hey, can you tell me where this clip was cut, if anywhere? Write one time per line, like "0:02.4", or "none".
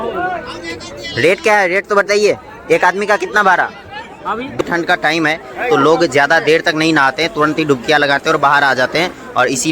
0:04.5